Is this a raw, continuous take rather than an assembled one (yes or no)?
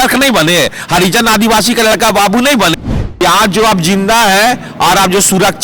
no